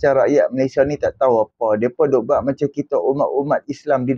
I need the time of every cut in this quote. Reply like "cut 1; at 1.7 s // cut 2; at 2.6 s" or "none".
none